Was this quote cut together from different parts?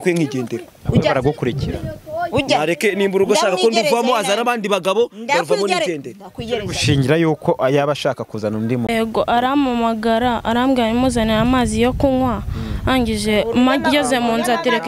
yes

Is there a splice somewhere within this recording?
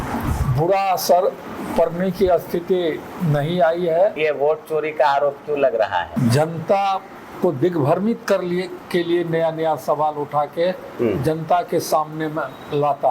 yes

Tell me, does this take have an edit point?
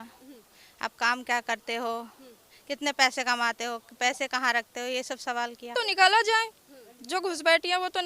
yes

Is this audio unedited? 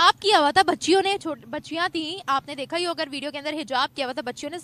yes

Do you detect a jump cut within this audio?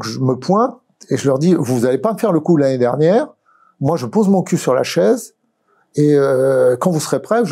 no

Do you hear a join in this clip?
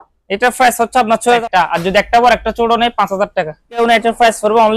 yes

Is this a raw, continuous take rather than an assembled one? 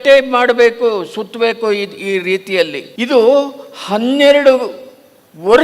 no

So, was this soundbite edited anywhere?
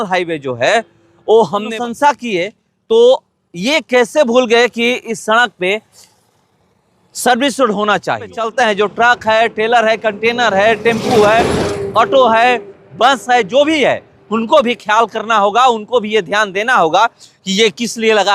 yes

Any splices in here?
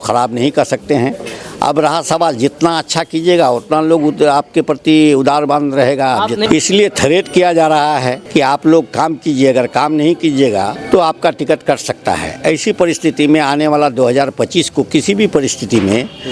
yes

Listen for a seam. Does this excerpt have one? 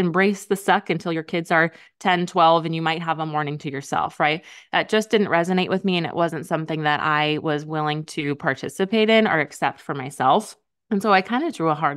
no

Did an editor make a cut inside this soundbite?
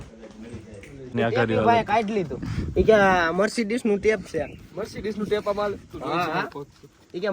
yes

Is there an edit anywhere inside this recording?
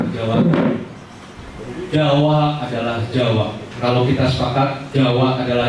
yes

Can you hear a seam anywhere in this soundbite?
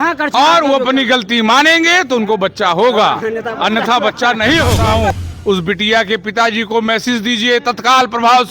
yes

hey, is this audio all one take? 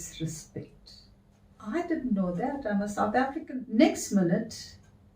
no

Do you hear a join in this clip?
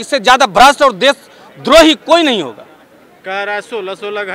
no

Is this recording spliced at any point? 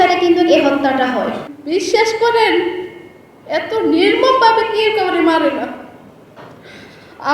yes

